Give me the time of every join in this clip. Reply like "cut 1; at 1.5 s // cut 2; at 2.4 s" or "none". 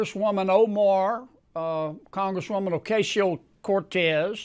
none